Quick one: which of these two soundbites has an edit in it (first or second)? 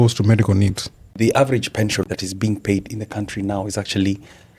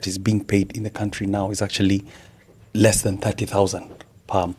first